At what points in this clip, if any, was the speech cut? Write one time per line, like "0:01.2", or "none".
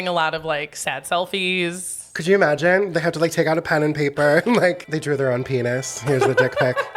0:04.9